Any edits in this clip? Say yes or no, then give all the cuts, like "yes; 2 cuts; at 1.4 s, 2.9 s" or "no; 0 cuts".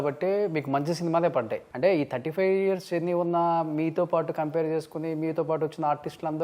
yes; 1 cut; at 1.6 s